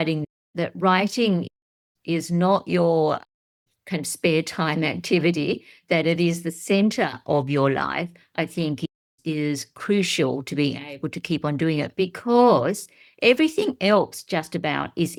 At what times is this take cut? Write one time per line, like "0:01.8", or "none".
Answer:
none